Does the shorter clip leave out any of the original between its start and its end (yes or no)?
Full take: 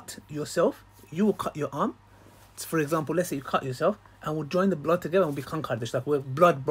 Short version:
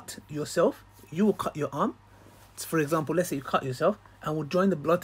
no